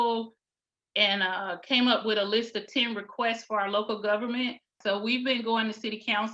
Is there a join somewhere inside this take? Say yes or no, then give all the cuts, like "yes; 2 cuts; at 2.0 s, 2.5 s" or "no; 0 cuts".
yes; 1 cut; at 4.7 s